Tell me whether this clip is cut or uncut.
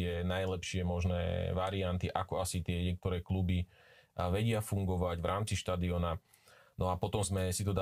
uncut